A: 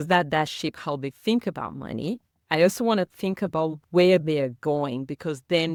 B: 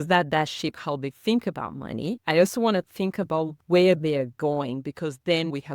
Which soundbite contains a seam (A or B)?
B